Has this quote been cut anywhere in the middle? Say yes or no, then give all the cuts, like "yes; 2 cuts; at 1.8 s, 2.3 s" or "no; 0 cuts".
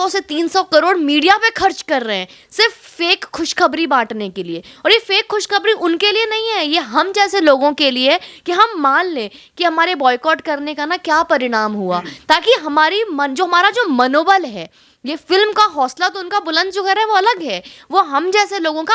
no; 0 cuts